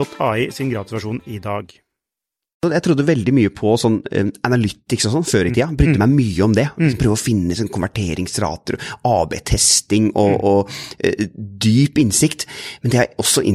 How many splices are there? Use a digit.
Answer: 1